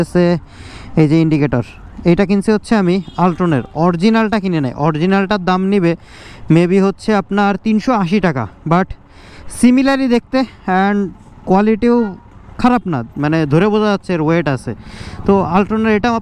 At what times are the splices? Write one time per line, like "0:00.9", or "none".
none